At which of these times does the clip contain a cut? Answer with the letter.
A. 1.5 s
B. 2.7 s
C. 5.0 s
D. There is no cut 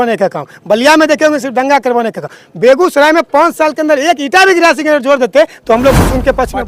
D